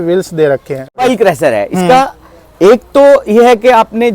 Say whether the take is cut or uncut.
cut